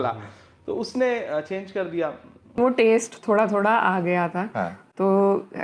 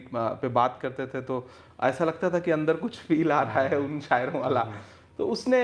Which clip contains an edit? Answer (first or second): first